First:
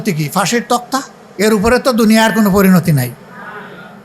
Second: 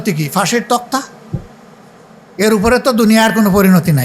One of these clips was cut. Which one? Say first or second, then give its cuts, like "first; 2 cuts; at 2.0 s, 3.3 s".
first; 1 cut; at 1.2 s